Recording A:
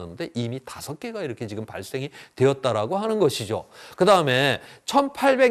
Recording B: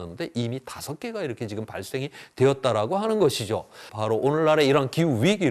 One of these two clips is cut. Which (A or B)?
B